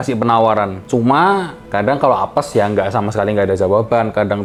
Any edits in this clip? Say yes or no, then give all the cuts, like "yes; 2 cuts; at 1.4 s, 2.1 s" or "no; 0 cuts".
no; 0 cuts